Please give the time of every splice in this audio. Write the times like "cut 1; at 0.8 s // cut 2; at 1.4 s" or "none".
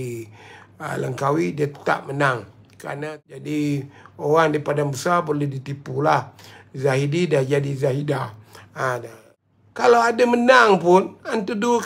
cut 1; at 2.9 s // cut 2; at 9.3 s